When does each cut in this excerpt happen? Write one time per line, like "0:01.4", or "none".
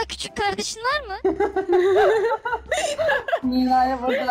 0:01.2